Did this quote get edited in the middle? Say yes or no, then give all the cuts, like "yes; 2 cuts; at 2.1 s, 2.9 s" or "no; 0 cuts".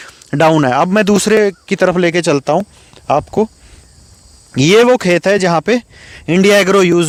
no; 0 cuts